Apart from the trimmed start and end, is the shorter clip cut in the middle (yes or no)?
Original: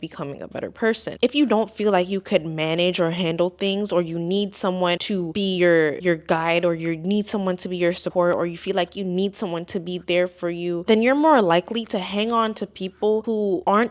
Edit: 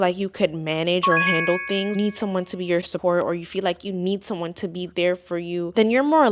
yes